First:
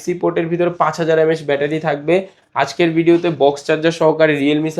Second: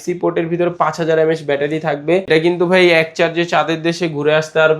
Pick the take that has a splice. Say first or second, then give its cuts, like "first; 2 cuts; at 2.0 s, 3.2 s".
second; 1 cut; at 2.3 s